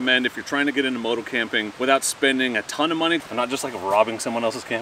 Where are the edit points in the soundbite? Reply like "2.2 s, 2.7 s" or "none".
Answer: 1.7 s, 3.2 s

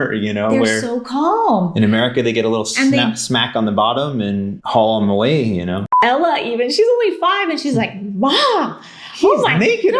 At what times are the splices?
4.6 s, 6.0 s

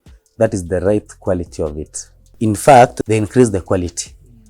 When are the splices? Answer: 2.3 s, 3.0 s

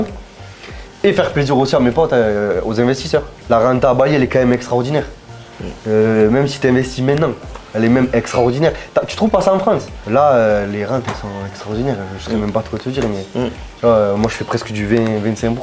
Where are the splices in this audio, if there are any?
3.3 s, 10.0 s

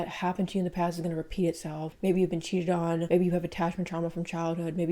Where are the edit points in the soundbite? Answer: 1.9 s

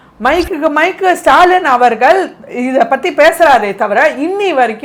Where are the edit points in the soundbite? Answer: none

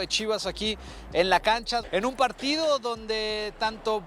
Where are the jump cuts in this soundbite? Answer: 1.9 s

